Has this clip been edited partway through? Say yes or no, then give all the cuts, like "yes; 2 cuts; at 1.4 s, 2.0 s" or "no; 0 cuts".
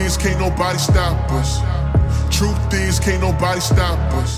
no; 0 cuts